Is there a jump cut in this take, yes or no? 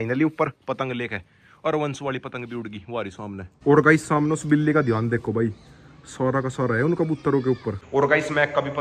yes